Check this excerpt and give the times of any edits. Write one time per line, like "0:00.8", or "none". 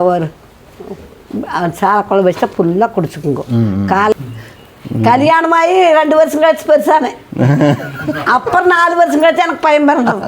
0:04.1